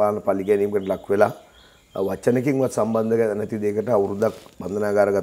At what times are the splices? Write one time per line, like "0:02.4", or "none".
none